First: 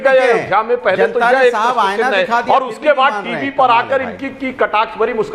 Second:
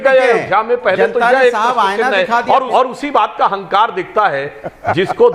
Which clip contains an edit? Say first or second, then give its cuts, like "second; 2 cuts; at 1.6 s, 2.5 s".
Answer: second; 1 cut; at 2.7 s